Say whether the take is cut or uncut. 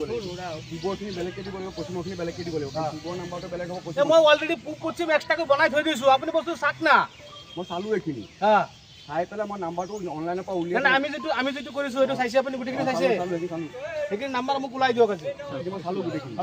uncut